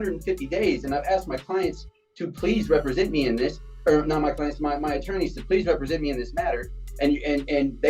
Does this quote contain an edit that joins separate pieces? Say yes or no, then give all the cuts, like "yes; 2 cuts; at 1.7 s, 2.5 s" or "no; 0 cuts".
no; 0 cuts